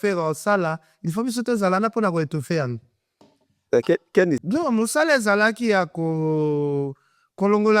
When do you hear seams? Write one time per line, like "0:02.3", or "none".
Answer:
0:04.4